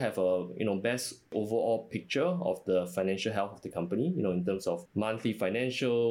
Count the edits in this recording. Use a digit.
2